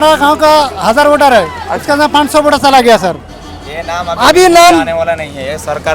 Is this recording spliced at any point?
yes; 1 cut; at 3.3 s

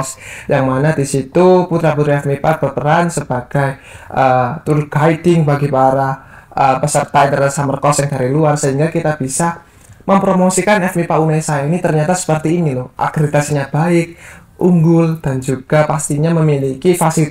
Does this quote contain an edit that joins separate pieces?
no; 0 cuts

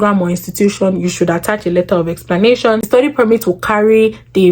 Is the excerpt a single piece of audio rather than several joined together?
no; 1 cut; at 2.9 s

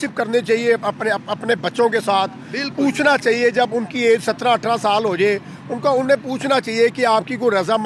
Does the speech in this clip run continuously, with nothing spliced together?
yes; 0 cuts

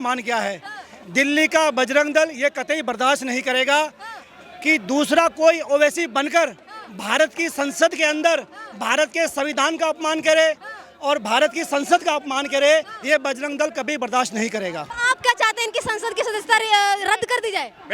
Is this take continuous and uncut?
no; 1 cut; at 14.9 s

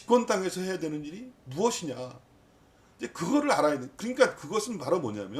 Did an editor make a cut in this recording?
no; 0 cuts

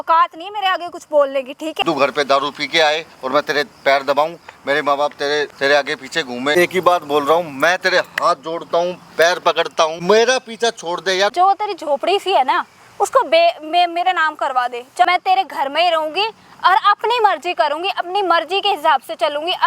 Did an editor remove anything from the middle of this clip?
yes; 6 cuts; at 1.8 s, 5.5 s, 6.5 s, 10.0 s, 11.3 s, 15.0 s

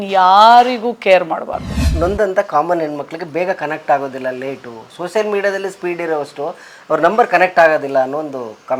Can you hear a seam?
yes; 1 cut; at 1.7 s

